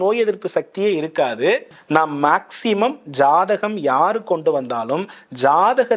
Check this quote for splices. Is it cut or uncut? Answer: cut